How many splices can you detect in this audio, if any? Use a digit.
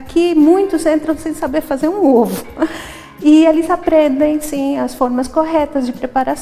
0